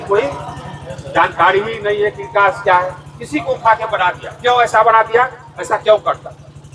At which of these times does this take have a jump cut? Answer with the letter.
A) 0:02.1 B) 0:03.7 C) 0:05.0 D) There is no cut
D